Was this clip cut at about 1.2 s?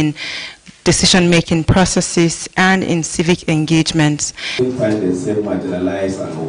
no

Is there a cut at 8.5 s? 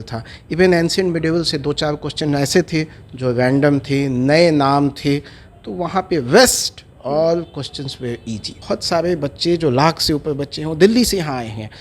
yes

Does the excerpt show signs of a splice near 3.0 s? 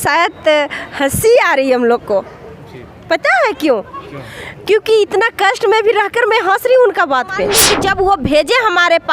no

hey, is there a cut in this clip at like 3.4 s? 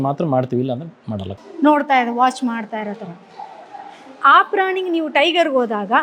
no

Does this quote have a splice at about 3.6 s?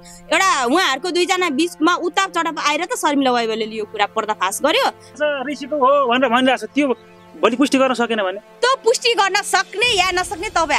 no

